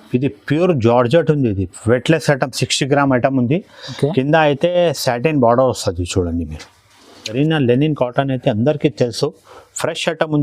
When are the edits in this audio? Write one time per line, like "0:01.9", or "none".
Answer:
0:07.3